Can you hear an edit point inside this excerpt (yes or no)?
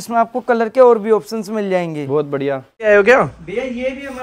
no